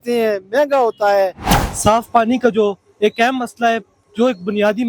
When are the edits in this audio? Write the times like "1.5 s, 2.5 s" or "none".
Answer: 1.5 s